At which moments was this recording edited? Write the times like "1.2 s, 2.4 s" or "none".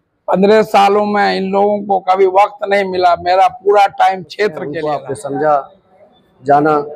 4.8 s